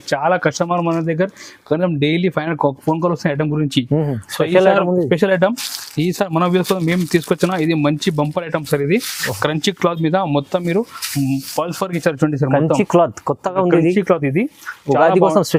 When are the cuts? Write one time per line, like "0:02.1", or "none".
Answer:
none